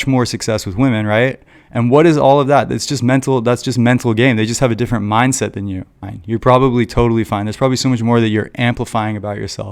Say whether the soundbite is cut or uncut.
cut